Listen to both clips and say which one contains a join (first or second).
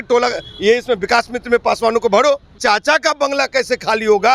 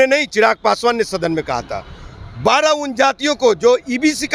first